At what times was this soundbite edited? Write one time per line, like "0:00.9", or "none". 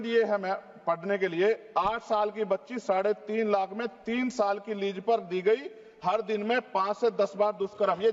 none

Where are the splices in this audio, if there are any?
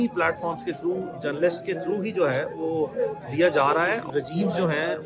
0:04.0

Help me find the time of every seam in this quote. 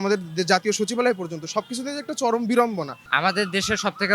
0:03.0

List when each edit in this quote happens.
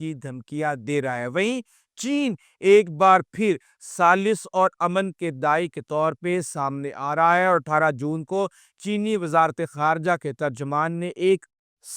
none

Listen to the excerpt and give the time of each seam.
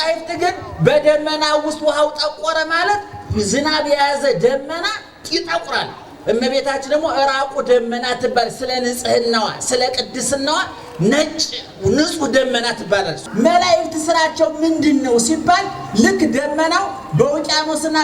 0:13.2

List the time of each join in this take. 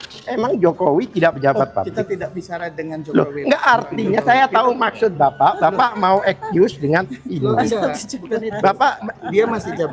none

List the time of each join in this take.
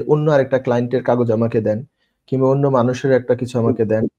none

